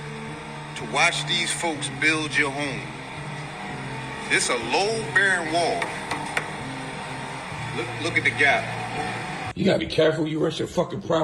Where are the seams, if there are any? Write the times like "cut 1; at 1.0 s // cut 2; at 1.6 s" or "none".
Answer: cut 1; at 9.5 s